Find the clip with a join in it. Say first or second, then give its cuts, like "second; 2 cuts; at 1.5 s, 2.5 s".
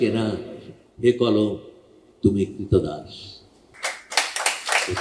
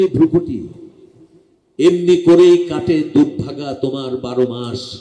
first; 1 cut; at 3.7 s